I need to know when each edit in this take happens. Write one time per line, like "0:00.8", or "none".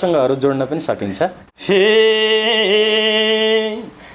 0:01.5